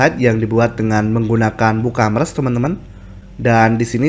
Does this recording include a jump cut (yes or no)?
no